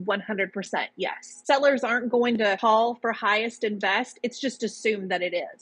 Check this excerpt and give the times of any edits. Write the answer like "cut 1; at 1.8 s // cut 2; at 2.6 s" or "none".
cut 1; at 1.4 s